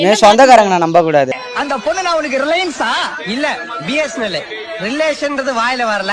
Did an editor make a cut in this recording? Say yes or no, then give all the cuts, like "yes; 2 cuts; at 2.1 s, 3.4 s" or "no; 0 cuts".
no; 0 cuts